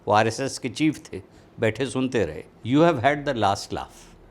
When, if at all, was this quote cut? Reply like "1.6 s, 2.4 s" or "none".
2.5 s